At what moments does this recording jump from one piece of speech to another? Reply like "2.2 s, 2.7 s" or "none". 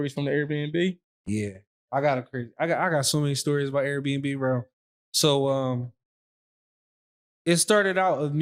none